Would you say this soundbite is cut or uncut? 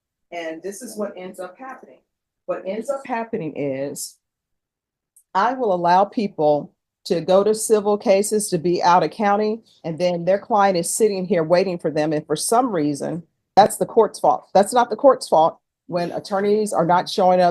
cut